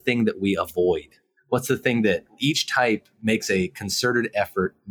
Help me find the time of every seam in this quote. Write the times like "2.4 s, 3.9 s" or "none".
none

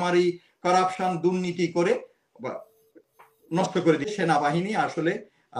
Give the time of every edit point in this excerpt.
4.1 s

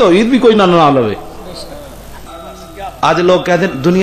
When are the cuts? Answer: 2.2 s

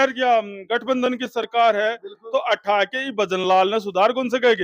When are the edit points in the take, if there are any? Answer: none

